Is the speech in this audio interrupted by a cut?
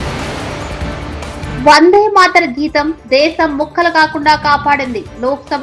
yes; 1 cut; at 1.4 s

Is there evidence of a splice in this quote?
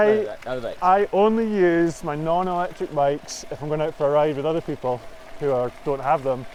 no; 0 cuts

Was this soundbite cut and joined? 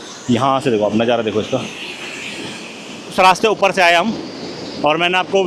yes; 1 cut; at 3.1 s

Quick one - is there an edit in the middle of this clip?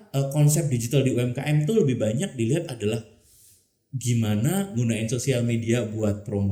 no; 0 cuts

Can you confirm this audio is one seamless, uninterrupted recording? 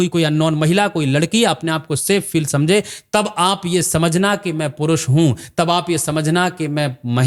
yes; 0 cuts

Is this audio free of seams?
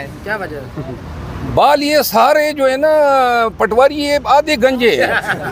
yes; 0 cuts

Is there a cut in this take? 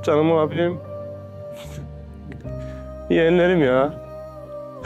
yes; 2 cuts; at 0.8 s, 3.1 s

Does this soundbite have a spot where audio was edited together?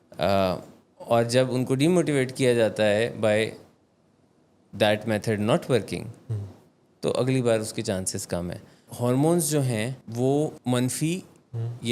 yes; 3 cuts; at 8.9 s, 10.0 s, 10.6 s

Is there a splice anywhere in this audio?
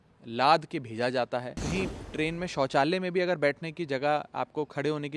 yes; 1 cut; at 1.6 s

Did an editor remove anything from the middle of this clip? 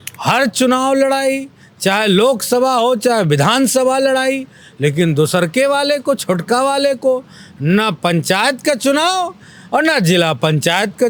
no; 0 cuts

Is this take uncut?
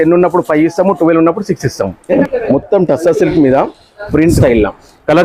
no; 2 cuts; at 2.1 s, 4.4 s

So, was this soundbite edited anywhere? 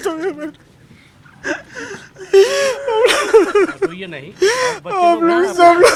no; 0 cuts

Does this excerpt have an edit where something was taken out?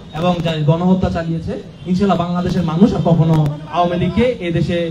no; 0 cuts

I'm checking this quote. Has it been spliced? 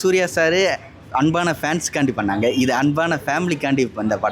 no; 0 cuts

